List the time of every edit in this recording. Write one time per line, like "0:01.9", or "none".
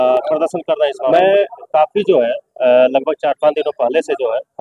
0:01.1